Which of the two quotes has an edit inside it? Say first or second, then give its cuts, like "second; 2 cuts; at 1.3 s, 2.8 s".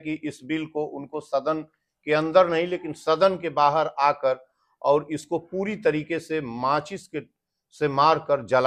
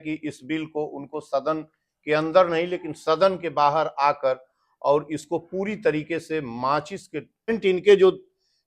second; 1 cut; at 7.6 s